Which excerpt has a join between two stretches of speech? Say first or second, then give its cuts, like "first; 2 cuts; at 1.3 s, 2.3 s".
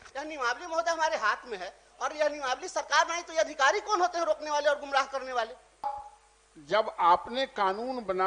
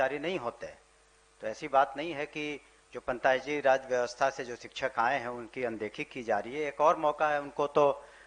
first; 1 cut; at 5.9 s